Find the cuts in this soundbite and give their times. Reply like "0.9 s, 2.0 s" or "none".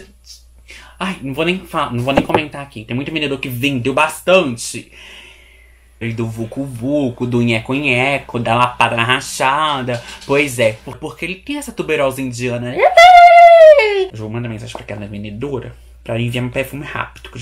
6.0 s, 10.9 s, 14.2 s